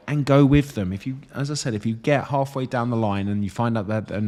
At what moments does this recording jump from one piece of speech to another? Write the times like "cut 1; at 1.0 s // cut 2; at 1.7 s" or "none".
none